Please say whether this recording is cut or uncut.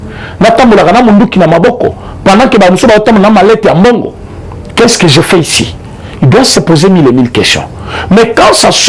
uncut